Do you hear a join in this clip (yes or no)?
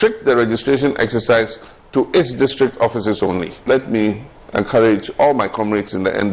yes